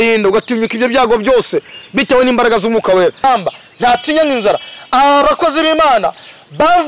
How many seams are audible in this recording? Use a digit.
1